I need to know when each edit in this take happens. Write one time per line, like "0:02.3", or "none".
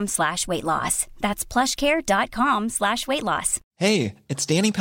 0:03.6